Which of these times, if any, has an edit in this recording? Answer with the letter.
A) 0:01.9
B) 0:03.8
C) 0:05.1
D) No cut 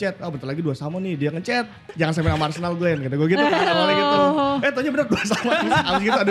A